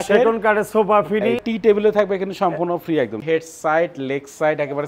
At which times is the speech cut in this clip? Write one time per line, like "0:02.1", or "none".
0:01.4
0:03.2